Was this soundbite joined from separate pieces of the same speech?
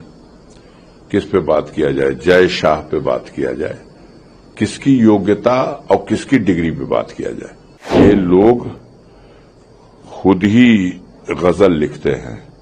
yes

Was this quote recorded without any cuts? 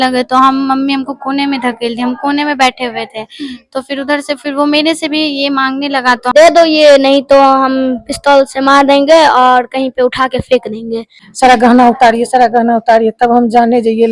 no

